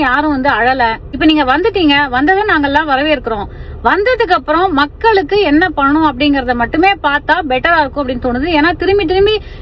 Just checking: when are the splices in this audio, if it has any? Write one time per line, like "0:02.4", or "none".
none